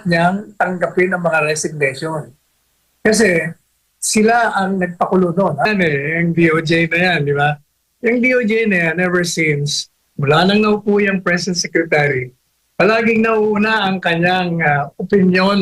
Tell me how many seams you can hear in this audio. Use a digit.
1